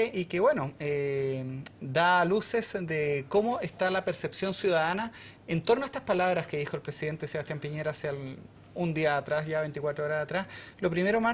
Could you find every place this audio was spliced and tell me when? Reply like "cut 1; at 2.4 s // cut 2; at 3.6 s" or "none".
cut 1; at 10.0 s